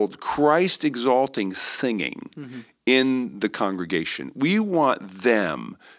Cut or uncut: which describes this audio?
uncut